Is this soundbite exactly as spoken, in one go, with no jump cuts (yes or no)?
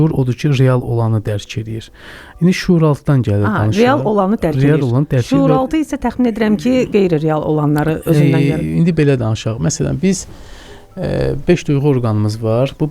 no